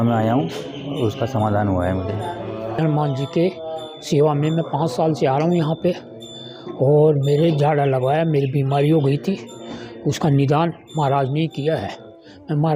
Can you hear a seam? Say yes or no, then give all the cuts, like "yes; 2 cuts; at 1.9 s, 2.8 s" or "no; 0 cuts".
yes; 1 cut; at 2.8 s